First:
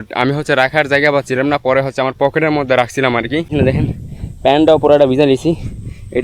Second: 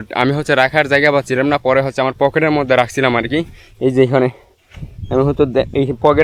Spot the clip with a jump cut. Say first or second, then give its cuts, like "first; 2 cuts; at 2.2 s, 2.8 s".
first; 1 cut; at 3.5 s